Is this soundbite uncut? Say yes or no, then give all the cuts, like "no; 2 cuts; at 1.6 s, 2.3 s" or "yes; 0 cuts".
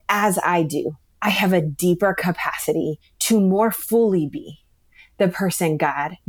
no; 1 cut; at 3.1 s